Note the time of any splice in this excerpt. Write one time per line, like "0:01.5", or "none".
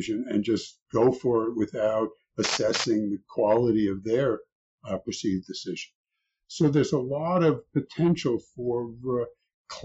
none